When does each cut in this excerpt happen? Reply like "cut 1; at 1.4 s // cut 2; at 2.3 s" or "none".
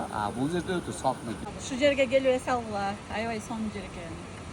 cut 1; at 1.4 s